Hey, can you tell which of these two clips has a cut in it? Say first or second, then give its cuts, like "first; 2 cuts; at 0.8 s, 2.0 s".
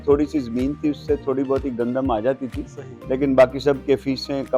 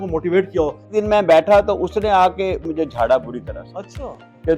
second; 2 cuts; at 0.9 s, 2.6 s